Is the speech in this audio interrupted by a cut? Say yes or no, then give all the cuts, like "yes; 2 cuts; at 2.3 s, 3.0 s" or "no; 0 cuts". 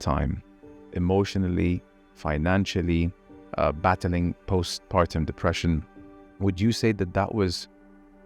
no; 0 cuts